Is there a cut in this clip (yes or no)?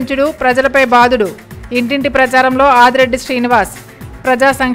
no